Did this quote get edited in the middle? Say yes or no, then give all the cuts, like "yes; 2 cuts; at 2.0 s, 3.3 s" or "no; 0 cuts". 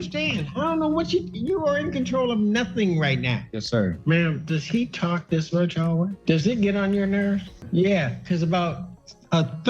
yes; 2 cuts; at 3.8 s, 6.2 s